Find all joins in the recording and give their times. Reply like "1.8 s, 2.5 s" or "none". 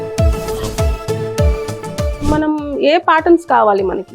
2.2 s